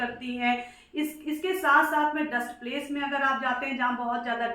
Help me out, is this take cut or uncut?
uncut